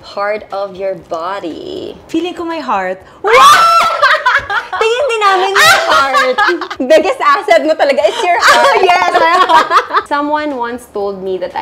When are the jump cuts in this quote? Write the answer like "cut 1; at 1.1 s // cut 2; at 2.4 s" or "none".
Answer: cut 1; at 2.0 s // cut 2; at 6.7 s // cut 3; at 10.0 s